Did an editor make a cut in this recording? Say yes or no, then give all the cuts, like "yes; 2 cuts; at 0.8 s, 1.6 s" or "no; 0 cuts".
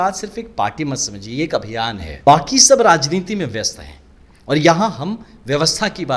yes; 1 cut; at 2.0 s